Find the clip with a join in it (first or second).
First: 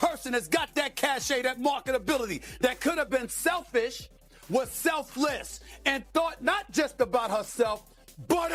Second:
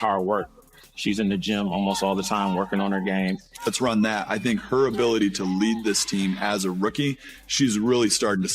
second